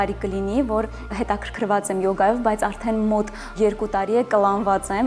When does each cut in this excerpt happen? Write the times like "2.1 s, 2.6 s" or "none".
1.1 s, 3.5 s